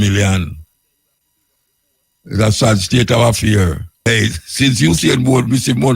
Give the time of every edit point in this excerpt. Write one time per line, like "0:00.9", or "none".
0:03.9